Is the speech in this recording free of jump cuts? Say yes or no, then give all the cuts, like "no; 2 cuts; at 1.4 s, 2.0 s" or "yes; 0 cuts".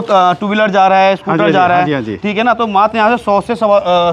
yes; 0 cuts